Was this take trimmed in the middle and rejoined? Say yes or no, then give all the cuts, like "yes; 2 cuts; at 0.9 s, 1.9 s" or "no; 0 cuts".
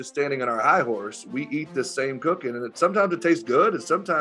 no; 0 cuts